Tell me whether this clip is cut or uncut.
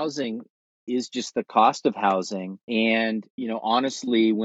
cut